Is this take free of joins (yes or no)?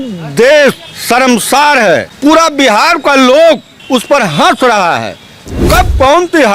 no